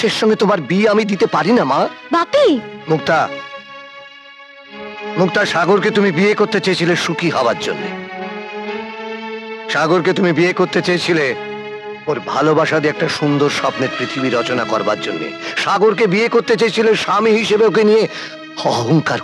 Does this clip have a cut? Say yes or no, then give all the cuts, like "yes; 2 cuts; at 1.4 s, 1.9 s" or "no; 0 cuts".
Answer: no; 0 cuts